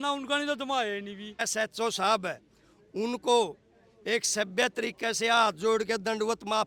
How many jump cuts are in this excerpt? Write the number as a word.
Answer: one